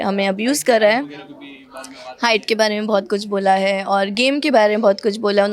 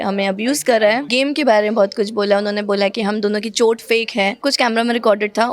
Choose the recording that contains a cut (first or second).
second